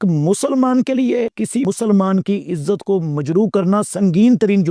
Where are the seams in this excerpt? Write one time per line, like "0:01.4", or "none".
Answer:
0:01.6